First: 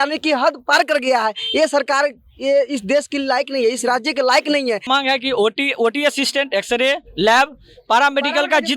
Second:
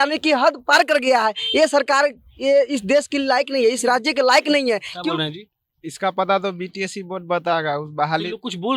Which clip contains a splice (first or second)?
first